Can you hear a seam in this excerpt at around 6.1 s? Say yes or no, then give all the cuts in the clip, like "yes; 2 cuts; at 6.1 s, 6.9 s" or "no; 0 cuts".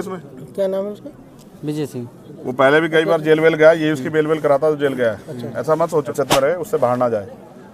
yes; 1 cut; at 6.1 s